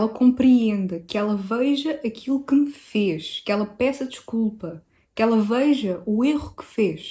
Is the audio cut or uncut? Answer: uncut